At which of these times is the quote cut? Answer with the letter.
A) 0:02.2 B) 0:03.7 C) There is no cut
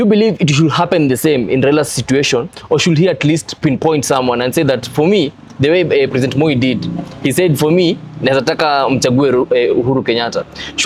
C